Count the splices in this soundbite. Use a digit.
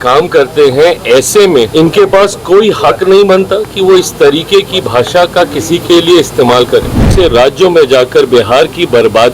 2